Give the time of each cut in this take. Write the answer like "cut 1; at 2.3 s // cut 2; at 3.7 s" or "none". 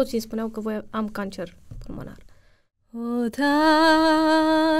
cut 1; at 3.0 s

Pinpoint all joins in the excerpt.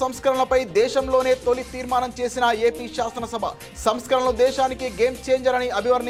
none

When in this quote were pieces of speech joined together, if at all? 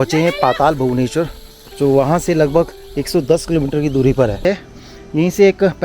cut 1; at 4.4 s

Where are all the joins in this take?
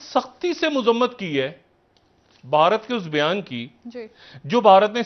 none

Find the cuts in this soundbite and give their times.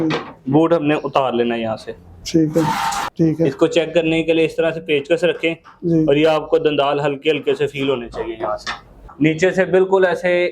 cut 1; at 3.0 s // cut 2; at 9.0 s

